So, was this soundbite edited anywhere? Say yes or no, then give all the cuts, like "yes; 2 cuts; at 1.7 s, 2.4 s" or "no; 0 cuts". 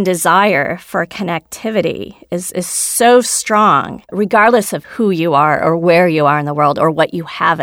yes; 2 cuts; at 4.1 s, 4.8 s